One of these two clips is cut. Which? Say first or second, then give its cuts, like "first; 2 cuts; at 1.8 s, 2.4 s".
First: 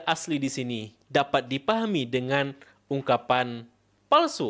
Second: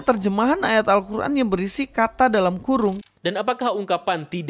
second; 1 cut; at 3.0 s